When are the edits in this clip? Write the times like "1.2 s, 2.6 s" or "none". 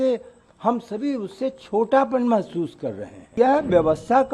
3.3 s